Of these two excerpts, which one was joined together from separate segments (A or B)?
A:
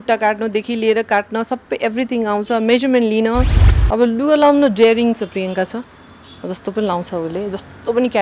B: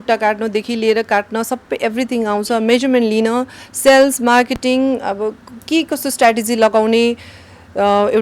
A